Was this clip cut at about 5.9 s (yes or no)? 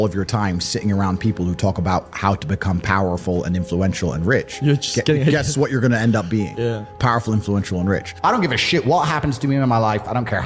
no